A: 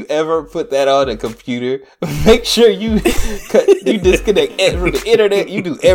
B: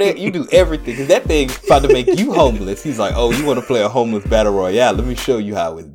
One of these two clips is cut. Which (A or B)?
B